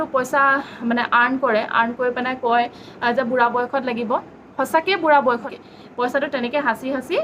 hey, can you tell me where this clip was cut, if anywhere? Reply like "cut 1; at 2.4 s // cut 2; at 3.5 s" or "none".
cut 1; at 5.4 s